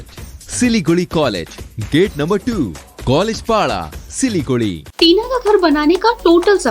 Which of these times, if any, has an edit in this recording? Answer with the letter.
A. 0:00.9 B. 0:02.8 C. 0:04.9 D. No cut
C